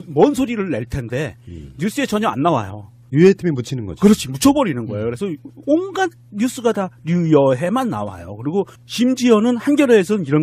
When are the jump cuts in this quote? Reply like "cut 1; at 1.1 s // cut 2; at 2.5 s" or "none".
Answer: cut 1; at 2.7 s